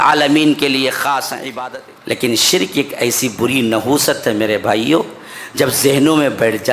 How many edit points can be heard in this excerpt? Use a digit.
1